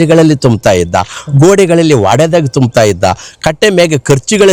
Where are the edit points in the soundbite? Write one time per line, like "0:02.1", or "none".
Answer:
none